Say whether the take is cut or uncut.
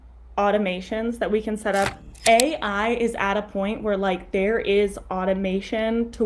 cut